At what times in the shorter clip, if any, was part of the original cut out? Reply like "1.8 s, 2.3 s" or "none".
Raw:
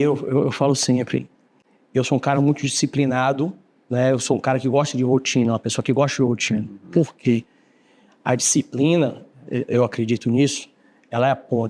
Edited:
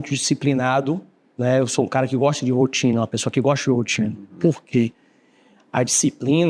none